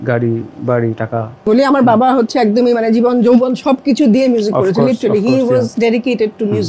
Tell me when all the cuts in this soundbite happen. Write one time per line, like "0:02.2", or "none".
0:01.5